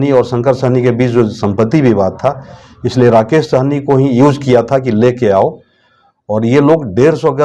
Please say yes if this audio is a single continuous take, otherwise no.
yes